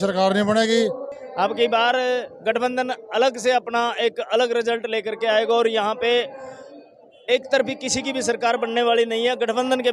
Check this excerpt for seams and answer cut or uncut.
cut